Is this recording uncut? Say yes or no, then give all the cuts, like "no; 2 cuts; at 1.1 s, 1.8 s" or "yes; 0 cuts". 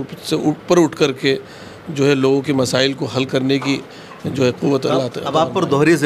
yes; 0 cuts